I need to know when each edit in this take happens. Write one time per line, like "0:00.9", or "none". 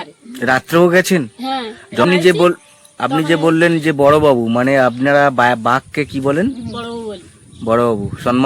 0:02.0